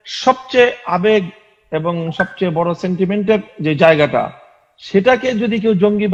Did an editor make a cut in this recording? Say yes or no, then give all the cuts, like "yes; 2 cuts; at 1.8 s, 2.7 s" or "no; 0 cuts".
no; 0 cuts